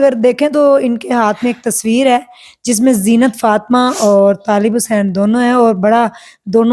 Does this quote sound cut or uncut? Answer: uncut